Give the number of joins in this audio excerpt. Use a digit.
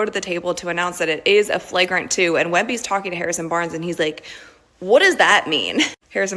2